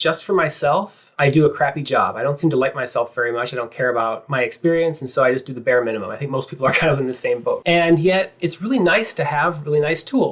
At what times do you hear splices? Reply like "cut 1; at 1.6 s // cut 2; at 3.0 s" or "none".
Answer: cut 1; at 1.0 s // cut 2; at 7.6 s

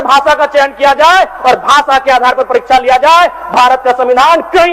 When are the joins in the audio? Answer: none

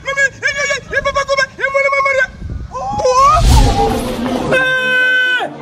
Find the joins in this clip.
none

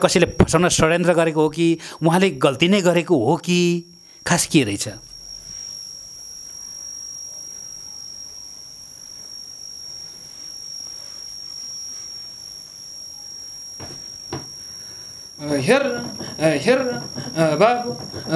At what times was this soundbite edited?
cut 1; at 15.4 s

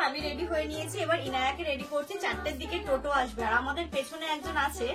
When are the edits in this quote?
none

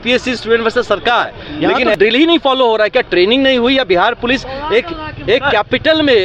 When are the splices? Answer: cut 1; at 2.0 s

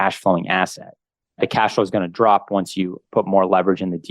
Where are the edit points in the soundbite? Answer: cut 1; at 1.4 s

